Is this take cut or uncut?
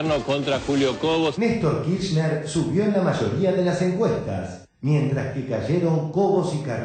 uncut